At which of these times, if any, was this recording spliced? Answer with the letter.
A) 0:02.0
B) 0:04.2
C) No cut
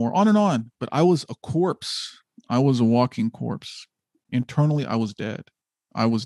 B